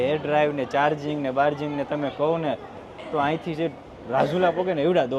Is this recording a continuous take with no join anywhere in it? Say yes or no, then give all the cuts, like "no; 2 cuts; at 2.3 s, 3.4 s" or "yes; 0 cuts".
yes; 0 cuts